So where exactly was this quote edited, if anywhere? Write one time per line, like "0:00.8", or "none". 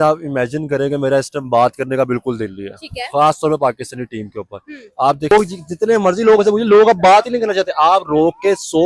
0:05.3